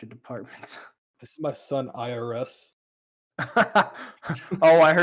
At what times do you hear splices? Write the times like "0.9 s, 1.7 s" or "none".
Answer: 1.0 s